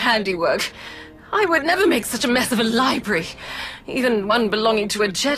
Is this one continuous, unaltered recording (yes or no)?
yes